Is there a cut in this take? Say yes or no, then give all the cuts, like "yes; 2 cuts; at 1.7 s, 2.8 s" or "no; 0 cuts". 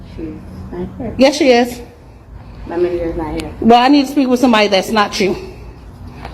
yes; 2 cuts; at 3.3 s, 4.3 s